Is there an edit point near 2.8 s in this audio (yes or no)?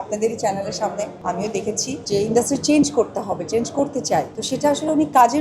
no